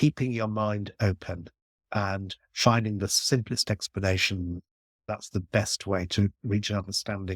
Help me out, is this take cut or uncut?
cut